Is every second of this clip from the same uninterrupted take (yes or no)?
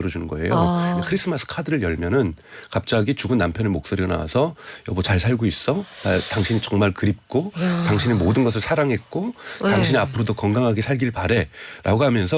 no